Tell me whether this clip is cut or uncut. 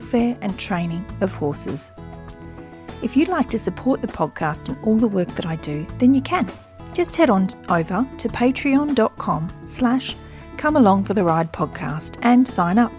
uncut